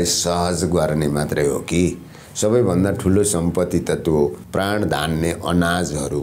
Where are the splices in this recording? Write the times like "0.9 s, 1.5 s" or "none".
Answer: 4.4 s